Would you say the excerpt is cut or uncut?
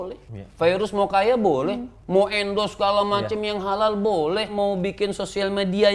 cut